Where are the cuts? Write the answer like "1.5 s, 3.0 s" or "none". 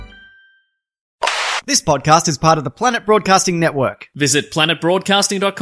1.5 s